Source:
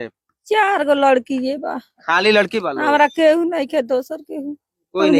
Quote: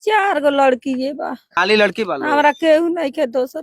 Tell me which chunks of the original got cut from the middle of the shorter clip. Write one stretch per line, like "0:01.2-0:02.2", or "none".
0:01.9-0:02.0